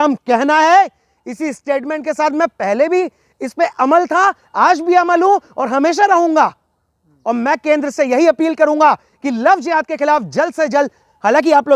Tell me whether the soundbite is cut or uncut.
uncut